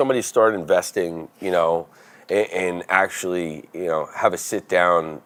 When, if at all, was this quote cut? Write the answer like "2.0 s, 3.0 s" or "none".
none